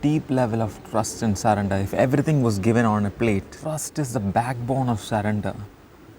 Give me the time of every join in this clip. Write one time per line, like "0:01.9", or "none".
0:03.6